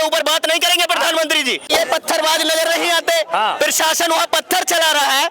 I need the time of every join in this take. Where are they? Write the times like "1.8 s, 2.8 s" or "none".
1.7 s